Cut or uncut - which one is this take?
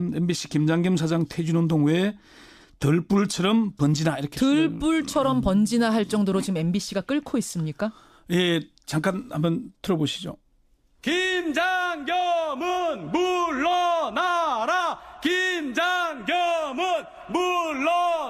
uncut